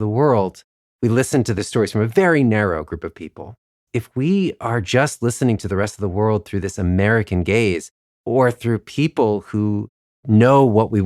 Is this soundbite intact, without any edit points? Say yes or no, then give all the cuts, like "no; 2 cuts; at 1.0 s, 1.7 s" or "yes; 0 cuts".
no; 2 cuts; at 1.5 s, 3.8 s